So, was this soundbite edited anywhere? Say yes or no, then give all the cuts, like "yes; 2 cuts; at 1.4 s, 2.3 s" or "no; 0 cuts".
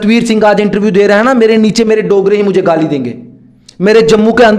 no; 0 cuts